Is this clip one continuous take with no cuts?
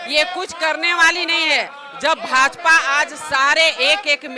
yes; 0 cuts

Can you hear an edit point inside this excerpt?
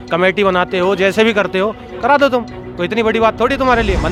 no; 0 cuts

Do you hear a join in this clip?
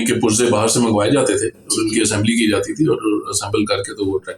no; 0 cuts

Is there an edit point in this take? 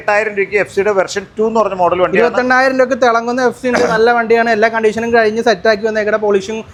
no; 0 cuts

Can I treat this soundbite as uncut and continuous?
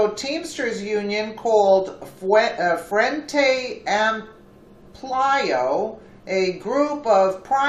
yes; 0 cuts

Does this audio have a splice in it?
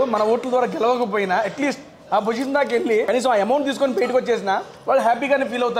yes; 1 cut; at 3.1 s

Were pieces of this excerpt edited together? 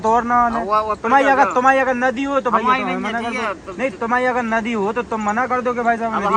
no; 0 cuts

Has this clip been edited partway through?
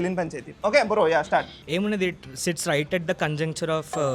yes; 1 cut; at 1.6 s

